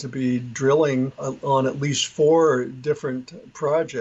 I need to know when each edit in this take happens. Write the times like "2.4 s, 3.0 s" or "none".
1.3 s